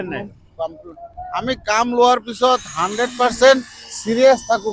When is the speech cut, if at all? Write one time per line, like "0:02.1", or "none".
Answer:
none